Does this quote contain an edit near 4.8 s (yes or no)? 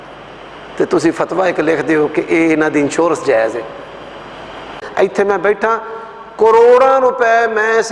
yes